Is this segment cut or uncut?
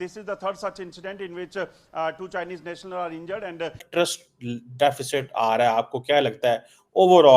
cut